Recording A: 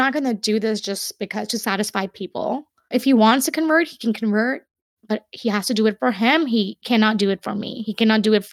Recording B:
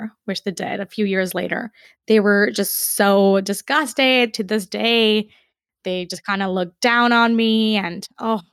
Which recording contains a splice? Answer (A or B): A